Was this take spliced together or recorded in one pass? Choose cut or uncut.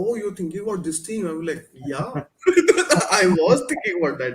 uncut